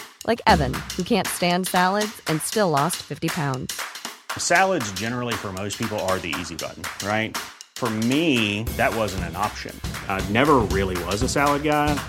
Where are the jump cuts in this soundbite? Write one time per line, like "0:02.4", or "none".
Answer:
none